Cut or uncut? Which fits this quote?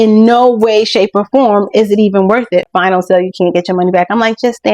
cut